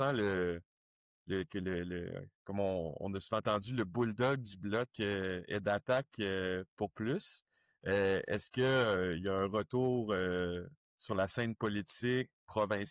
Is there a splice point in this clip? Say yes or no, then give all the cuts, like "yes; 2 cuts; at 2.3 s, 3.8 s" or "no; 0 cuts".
no; 0 cuts